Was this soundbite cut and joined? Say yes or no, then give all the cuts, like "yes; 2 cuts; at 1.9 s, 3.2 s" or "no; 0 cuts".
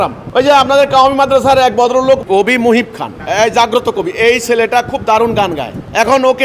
yes; 1 cut; at 2.2 s